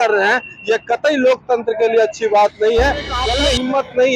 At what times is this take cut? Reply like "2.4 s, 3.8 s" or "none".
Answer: 3.2 s